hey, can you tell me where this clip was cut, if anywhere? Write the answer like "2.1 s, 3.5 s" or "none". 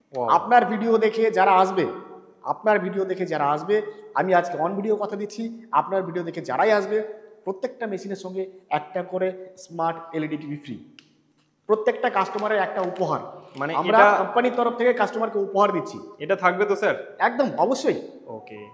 none